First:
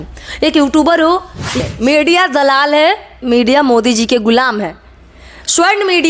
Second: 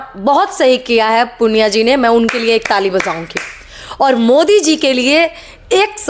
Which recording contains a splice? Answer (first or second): first